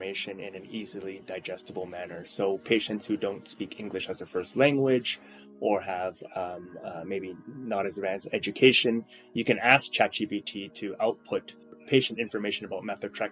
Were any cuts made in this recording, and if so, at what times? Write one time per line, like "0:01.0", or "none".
0:11.7